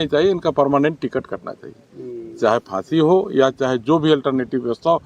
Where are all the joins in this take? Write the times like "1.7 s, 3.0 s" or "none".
none